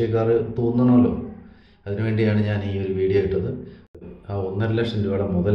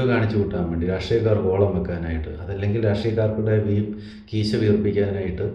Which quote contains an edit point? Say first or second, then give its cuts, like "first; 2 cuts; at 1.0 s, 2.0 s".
first; 1 cut; at 4.0 s